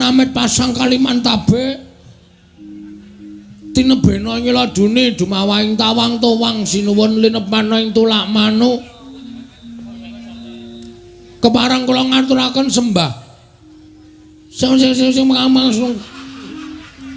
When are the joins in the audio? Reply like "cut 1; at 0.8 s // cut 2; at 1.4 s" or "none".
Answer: none